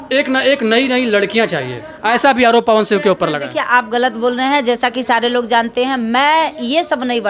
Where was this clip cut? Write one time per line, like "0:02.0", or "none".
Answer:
none